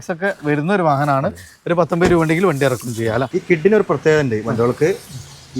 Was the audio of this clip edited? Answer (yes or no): yes